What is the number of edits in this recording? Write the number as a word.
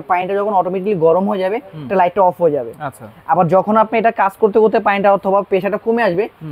zero